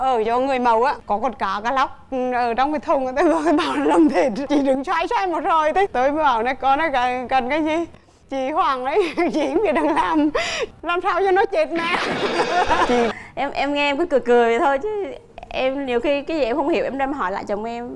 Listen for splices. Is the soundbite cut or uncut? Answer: cut